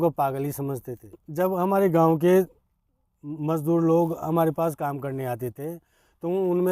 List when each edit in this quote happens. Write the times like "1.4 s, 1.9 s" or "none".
1.1 s